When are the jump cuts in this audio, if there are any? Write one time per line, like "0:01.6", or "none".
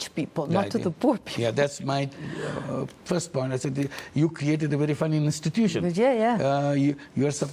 none